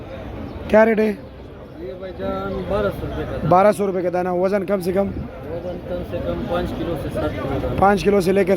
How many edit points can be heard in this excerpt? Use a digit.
0